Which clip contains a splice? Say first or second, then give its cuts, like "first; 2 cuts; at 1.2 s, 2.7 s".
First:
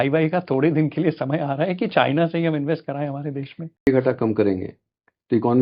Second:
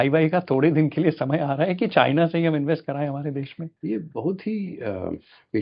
first; 1 cut; at 3.8 s